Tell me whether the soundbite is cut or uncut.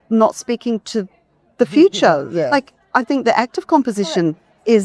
uncut